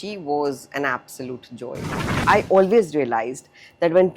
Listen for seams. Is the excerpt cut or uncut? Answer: cut